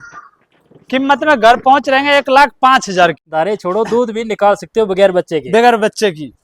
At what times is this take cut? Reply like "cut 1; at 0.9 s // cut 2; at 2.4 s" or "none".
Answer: cut 1; at 3.2 s

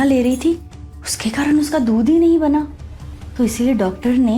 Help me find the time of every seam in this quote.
none

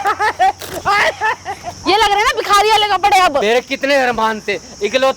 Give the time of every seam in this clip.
cut 1; at 3.4 s

